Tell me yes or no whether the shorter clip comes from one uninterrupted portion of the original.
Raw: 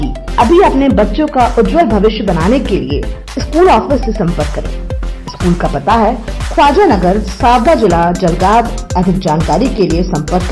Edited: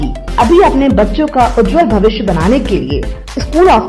yes